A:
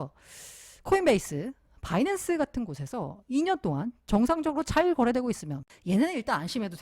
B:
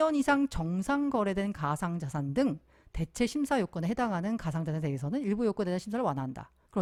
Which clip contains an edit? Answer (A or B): A